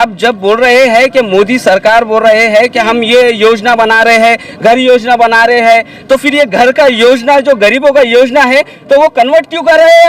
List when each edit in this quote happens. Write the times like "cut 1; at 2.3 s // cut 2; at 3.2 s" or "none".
none